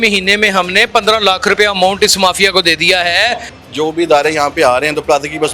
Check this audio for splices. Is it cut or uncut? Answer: cut